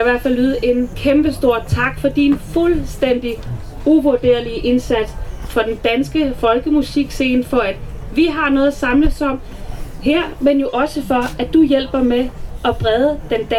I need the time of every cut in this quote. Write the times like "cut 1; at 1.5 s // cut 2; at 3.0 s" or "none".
cut 1; at 0.9 s